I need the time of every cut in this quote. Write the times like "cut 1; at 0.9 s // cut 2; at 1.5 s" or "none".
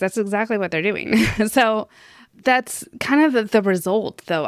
none